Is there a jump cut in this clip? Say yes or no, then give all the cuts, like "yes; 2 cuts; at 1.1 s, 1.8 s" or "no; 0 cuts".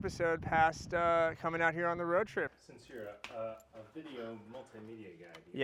yes; 1 cut; at 2.5 s